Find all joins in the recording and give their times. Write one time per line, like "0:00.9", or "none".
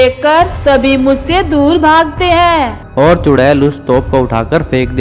0:02.8